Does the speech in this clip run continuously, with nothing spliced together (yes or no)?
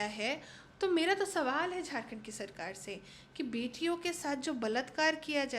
yes